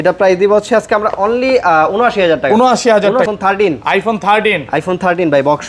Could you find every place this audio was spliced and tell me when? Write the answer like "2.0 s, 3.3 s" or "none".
3.3 s